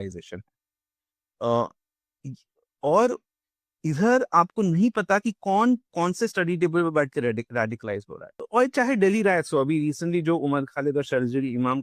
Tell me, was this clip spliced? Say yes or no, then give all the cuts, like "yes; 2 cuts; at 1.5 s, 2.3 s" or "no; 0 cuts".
yes; 1 cut; at 8.3 s